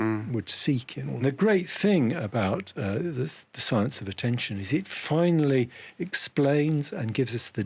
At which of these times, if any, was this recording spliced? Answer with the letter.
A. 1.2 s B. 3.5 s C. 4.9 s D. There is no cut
A